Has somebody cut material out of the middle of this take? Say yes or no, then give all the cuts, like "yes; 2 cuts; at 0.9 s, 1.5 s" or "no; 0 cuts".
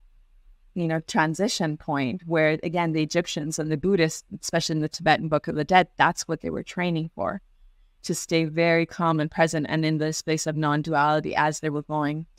no; 0 cuts